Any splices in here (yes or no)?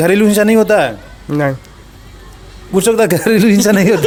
no